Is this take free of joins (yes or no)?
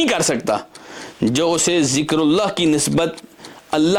yes